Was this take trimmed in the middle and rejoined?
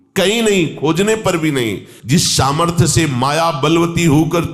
yes; 1 cut; at 1.9 s

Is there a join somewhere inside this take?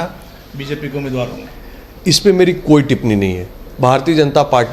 no; 0 cuts

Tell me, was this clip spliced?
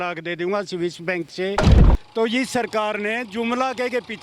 yes; 1 cut; at 1.8 s

